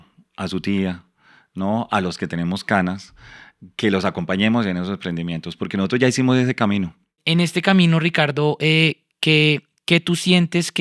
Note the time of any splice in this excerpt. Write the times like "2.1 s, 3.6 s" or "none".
7.2 s